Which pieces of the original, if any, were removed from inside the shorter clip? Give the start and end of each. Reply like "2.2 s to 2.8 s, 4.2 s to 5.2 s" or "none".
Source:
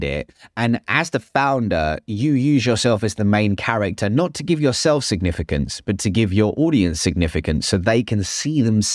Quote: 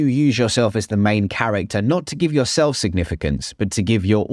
none

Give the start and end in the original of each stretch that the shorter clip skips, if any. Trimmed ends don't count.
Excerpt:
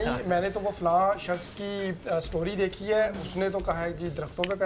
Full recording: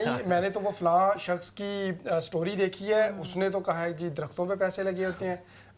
none

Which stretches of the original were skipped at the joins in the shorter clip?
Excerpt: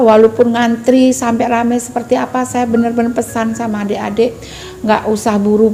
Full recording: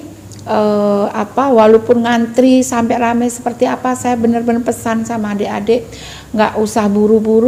none

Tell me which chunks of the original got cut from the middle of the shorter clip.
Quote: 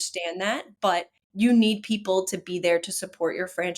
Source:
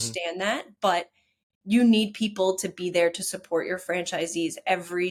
1.2 s to 1.5 s

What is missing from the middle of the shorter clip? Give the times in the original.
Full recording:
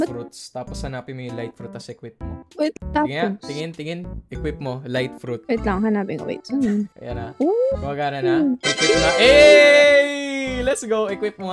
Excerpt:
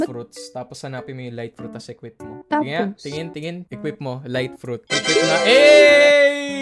2.4 s to 2.8 s, 4.1 s to 4.3 s, 5.5 s to 8.6 s

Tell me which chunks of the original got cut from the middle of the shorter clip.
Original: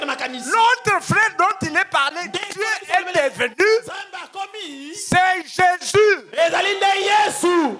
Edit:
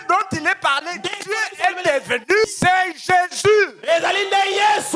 3.7 s to 4.9 s

